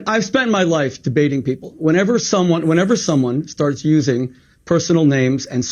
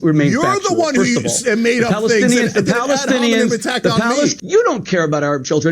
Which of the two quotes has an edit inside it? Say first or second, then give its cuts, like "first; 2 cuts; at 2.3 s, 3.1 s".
second; 1 cut; at 4.3 s